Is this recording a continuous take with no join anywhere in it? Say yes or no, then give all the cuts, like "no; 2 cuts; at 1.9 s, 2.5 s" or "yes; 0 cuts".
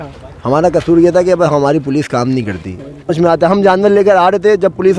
no; 1 cut; at 3.1 s